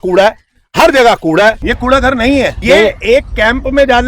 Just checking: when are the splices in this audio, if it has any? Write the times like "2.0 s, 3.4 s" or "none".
1.7 s, 2.6 s